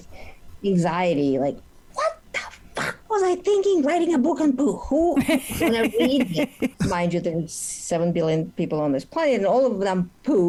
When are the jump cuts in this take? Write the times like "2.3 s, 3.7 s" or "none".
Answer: none